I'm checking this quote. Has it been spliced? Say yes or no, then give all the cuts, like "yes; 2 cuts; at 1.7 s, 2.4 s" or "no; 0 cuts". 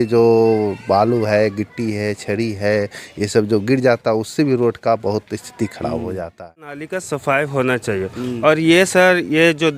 yes; 1 cut; at 6.9 s